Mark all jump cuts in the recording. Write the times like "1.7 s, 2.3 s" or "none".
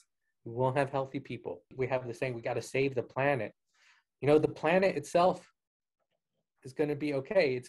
1.7 s

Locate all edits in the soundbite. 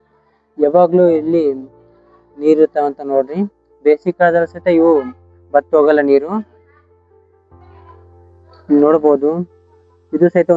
6.5 s, 8.6 s

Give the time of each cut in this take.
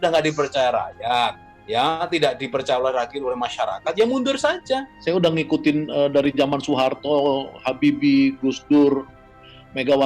4.9 s

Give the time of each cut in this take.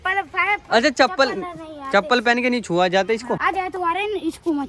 3.4 s

